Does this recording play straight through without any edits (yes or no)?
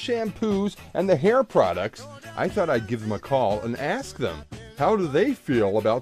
no